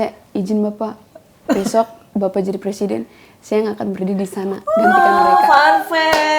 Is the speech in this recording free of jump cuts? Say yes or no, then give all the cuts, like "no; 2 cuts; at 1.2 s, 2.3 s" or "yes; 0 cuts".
yes; 0 cuts